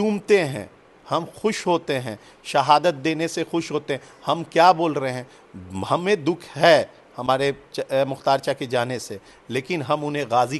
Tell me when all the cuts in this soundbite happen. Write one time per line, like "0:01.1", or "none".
none